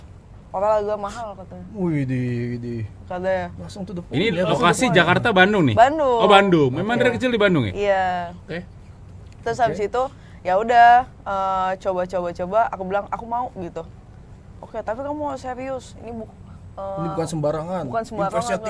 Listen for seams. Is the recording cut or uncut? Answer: uncut